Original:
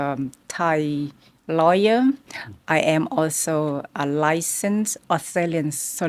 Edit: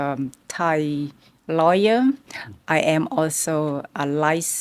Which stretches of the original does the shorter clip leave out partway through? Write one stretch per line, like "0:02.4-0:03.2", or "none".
none